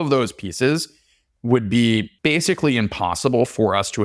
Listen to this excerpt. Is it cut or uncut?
cut